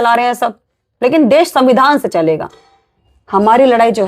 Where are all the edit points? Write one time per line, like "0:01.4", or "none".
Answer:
0:03.0